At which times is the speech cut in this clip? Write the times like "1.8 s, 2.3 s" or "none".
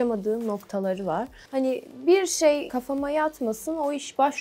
1.4 s, 2.7 s